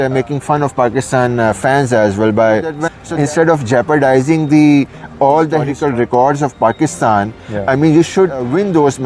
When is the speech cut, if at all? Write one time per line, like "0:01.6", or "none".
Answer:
0:02.9
0:05.7